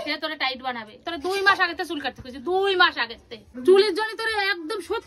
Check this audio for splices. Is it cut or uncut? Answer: cut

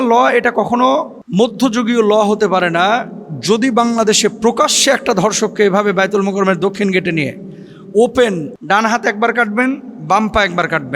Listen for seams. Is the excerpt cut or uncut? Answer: cut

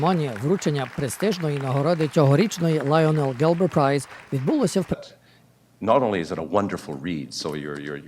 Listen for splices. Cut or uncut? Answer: uncut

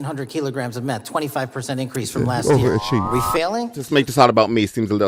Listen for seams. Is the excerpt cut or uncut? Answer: cut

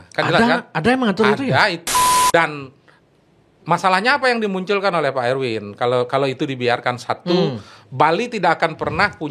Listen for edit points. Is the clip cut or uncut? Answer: cut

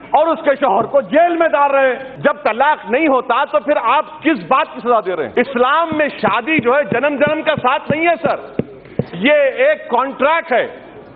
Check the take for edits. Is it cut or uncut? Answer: cut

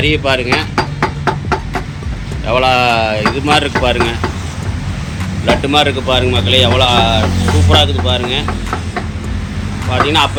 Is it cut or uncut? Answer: uncut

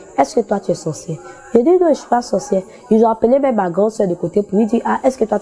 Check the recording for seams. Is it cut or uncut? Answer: uncut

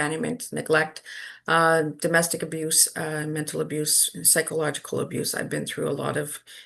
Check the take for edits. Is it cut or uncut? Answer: uncut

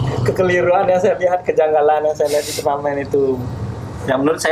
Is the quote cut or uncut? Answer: uncut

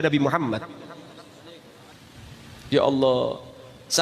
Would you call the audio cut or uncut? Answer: cut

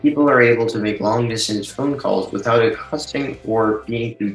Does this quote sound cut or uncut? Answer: uncut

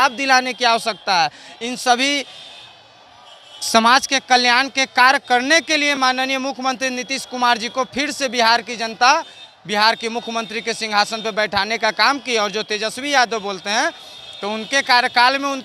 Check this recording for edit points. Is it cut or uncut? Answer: uncut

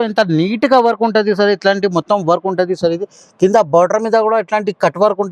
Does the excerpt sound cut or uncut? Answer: uncut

